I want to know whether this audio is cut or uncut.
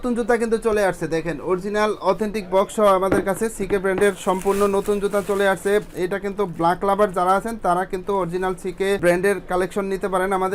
uncut